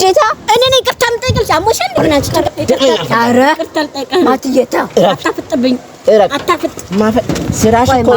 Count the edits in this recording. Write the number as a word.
one